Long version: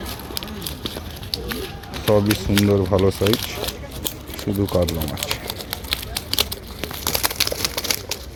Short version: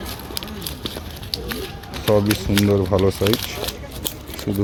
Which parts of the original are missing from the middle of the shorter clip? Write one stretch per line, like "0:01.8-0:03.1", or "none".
none